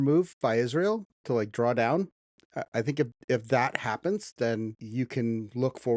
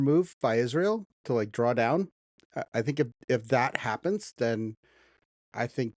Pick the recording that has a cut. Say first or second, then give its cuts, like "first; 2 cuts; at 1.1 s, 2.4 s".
first; 1 cut; at 4.8 s